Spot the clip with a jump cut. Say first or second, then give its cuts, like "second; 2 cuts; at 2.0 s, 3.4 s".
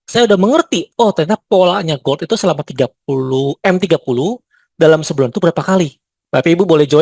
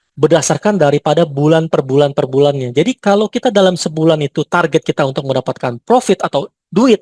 first; 1 cut; at 6.1 s